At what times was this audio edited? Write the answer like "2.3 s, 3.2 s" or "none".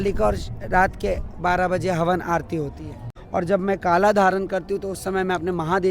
3.1 s